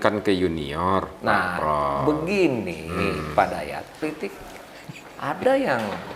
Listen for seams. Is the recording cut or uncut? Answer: cut